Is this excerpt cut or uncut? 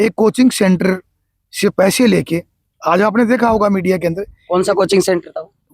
uncut